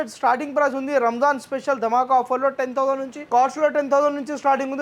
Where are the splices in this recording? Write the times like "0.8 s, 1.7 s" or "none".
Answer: 3.2 s